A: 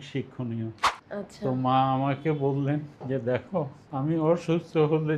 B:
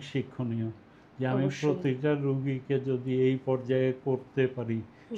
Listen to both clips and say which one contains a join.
A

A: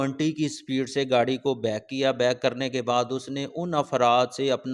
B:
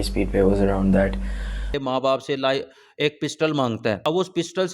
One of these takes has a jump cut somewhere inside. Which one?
B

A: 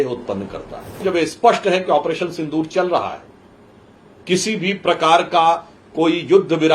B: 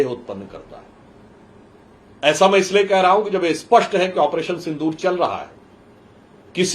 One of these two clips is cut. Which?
A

